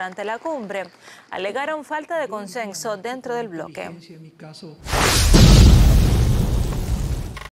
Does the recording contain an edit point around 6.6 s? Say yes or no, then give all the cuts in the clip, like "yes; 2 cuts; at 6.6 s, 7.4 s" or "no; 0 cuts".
no; 1 cut; at 4.9 s